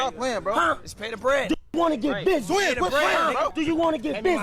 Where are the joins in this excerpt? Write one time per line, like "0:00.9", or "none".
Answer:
0:03.5